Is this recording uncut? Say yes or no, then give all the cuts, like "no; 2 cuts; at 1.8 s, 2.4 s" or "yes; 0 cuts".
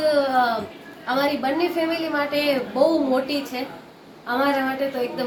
yes; 0 cuts